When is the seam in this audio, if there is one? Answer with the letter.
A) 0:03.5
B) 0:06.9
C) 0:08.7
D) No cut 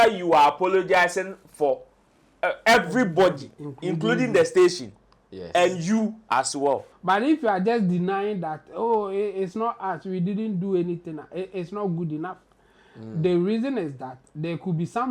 B